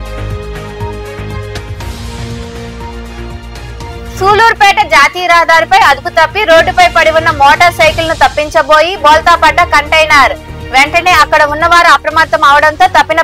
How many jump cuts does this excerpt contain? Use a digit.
1